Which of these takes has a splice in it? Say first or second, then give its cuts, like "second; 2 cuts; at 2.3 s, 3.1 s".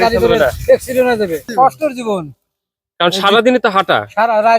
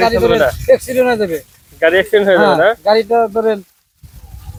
first; 1 cut; at 1.5 s